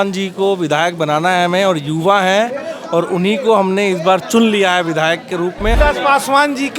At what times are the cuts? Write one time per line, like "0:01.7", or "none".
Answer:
0:05.7